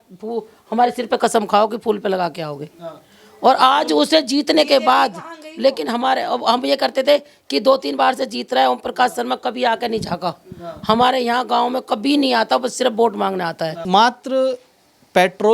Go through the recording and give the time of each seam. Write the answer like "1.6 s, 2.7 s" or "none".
13.8 s